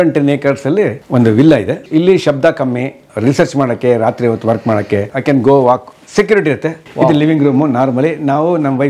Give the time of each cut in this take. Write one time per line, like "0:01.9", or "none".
0:01.0
0:01.8
0:05.1
0:06.8